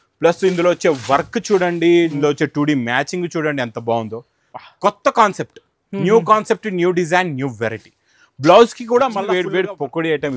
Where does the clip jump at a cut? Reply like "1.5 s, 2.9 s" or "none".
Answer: 9.3 s